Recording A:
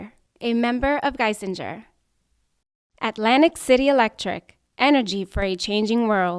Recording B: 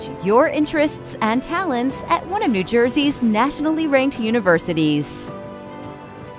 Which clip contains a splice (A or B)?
B